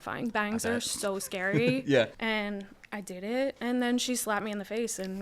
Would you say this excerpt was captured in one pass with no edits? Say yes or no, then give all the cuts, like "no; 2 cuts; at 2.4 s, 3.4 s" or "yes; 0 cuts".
no; 1 cut; at 2.1 s